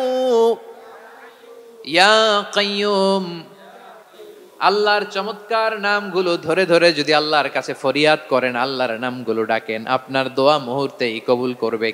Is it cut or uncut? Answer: uncut